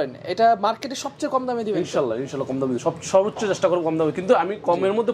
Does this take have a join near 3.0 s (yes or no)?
no